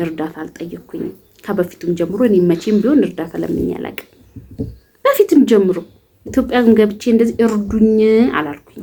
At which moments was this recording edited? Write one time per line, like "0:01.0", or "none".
none